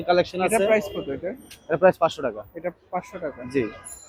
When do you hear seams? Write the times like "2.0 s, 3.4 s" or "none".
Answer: none